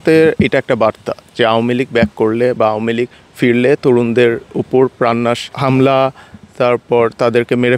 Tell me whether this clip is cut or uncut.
uncut